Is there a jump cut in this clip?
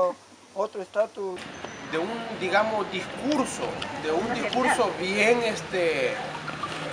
yes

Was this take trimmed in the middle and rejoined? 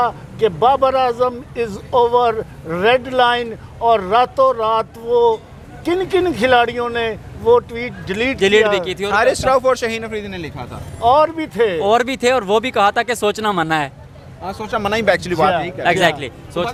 no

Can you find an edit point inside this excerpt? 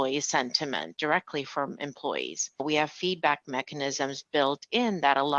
yes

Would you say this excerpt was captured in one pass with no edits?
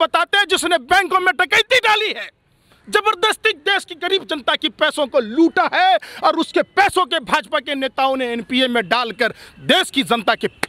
yes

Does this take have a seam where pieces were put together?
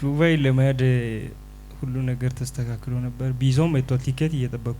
no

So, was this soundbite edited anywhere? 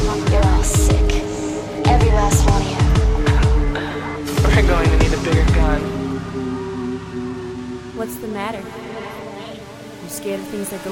no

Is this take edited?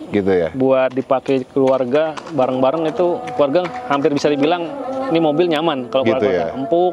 no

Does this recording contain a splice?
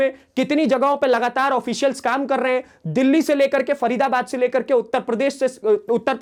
no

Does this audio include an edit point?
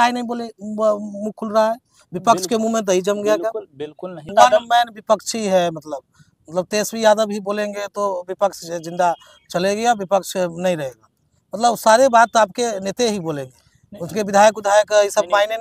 yes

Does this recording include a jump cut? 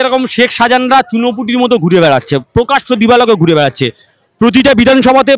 no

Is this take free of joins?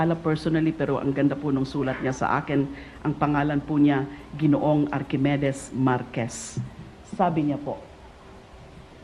no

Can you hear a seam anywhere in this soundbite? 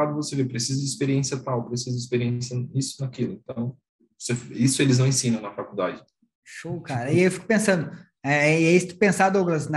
no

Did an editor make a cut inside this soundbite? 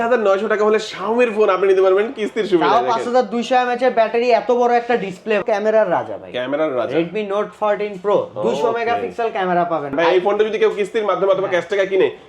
yes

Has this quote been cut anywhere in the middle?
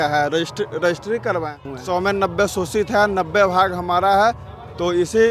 yes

